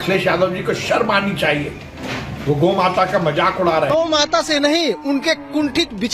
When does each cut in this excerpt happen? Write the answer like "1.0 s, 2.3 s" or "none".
3.9 s